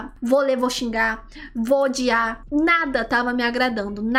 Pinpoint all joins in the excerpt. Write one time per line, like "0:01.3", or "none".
none

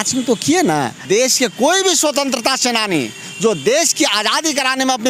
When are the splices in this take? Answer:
0:01.0

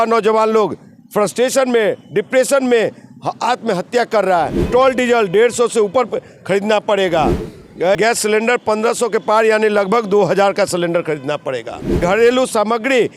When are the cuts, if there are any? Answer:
0:04.7
0:08.0
0:12.0

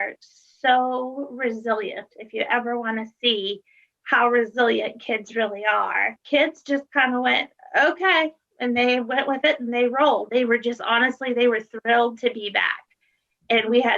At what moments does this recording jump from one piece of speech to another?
0:06.2

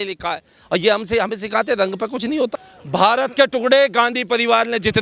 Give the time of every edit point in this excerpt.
0:02.7

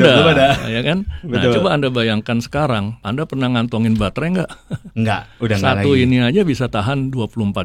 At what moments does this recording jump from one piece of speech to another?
0:03.0

